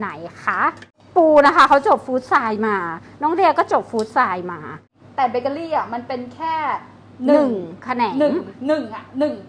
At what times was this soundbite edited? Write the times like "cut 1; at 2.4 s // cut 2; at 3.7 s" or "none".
none